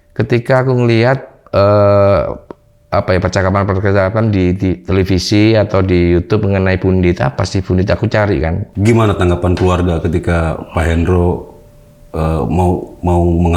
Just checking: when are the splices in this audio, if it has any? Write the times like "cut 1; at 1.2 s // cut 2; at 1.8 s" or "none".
cut 1; at 8.7 s

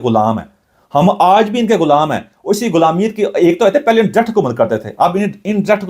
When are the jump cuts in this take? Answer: none

